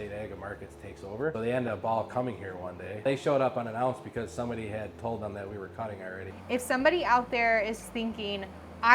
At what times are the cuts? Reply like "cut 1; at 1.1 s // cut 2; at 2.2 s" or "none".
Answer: cut 1; at 1.3 s // cut 2; at 3.0 s // cut 3; at 6.3 s